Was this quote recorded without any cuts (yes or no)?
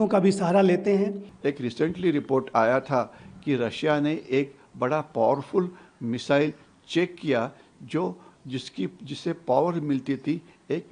no